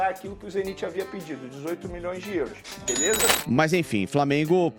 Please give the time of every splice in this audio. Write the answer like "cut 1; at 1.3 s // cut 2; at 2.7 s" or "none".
cut 1; at 3.4 s